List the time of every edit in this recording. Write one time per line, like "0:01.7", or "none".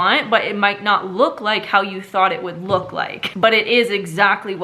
0:03.3